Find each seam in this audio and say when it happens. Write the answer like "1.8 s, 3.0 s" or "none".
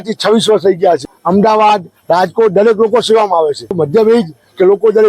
1.0 s, 3.8 s